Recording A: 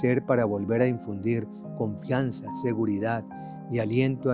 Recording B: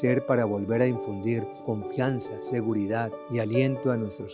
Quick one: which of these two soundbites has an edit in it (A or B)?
B